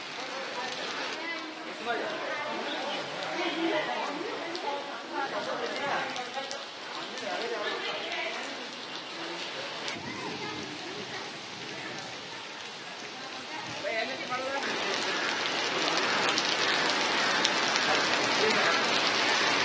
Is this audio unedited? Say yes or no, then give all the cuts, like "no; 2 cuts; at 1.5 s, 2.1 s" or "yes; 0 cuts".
no; 1 cut; at 1.1 s